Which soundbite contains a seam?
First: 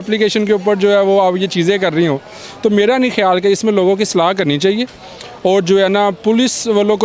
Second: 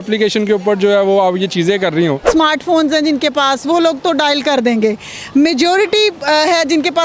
second; 1 cut; at 2.3 s

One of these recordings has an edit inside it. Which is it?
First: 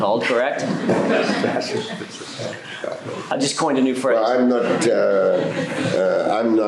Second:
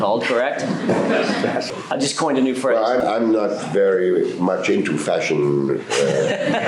second; 2 cuts; at 1.7 s, 3.0 s

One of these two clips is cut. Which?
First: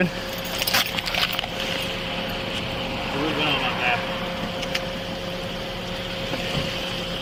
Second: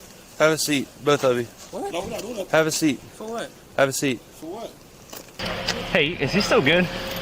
second; 1 cut; at 5.4 s

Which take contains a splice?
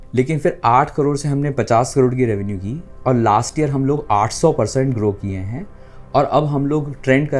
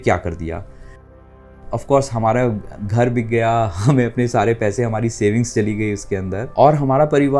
second; 2 cuts; at 1.3 s, 6.4 s

